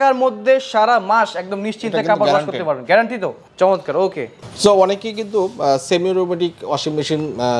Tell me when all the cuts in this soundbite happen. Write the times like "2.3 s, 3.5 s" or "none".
none

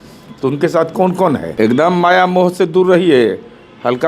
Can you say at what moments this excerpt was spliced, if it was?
1.5 s

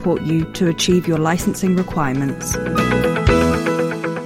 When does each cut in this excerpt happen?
2.5 s

